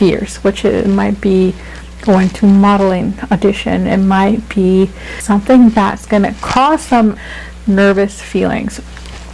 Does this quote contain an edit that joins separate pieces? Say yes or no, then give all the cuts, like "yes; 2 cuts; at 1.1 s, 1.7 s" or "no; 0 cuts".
yes; 2 cuts; at 5.2 s, 7.2 s